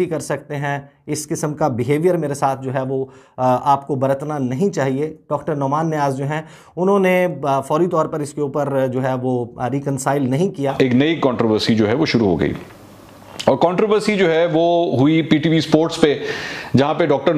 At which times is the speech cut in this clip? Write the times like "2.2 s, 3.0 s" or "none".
none